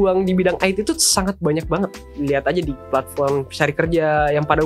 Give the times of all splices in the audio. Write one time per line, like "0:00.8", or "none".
0:02.0
0:02.9